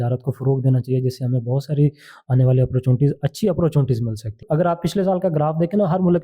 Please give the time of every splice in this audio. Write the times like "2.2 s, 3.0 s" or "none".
4.4 s